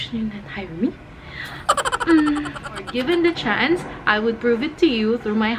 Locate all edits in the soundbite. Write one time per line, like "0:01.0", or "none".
0:02.9